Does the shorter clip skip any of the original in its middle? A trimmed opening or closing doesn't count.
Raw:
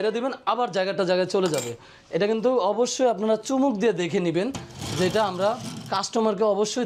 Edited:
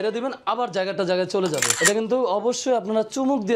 yes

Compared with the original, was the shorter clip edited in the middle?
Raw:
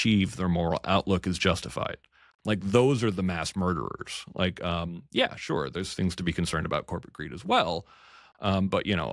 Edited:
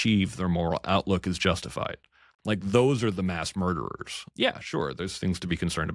yes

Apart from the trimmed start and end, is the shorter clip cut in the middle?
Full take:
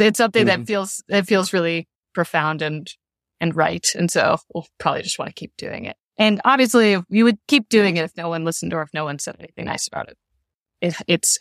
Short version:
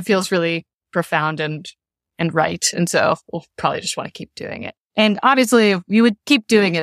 no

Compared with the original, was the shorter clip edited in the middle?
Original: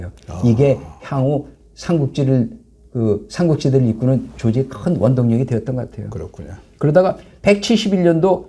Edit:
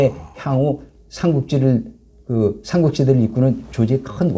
no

